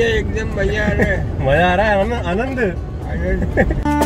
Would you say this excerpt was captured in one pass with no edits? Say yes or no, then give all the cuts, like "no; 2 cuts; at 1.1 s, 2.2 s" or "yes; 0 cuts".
yes; 0 cuts